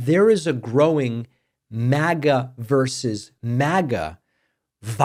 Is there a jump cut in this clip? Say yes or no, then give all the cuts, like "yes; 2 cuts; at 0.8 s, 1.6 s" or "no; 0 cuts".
no; 0 cuts